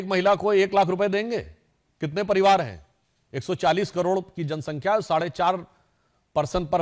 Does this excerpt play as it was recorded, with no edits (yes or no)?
yes